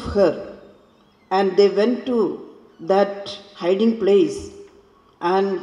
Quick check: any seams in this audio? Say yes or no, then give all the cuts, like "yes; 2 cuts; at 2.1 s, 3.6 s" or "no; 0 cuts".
no; 0 cuts